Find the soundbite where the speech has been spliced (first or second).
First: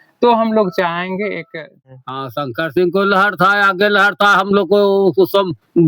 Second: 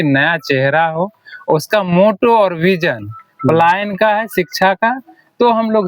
first